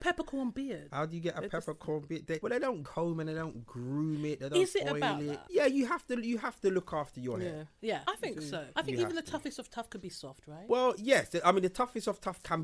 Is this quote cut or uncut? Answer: cut